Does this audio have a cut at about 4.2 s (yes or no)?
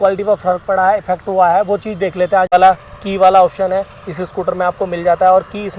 no